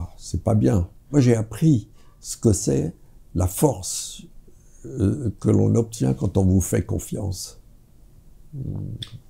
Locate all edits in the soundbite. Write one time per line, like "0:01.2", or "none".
0:01.0